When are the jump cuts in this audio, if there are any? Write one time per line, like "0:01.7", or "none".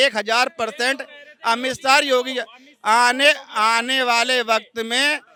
none